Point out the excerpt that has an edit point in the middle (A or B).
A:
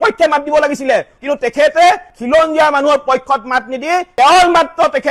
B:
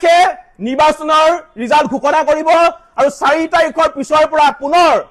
A